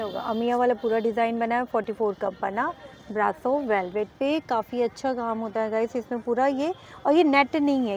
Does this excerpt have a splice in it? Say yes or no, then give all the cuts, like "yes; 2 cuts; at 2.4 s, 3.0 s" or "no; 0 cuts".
no; 0 cuts